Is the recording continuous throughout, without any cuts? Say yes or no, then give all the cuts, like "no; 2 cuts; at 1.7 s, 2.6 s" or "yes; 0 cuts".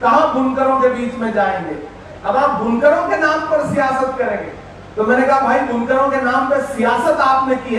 yes; 0 cuts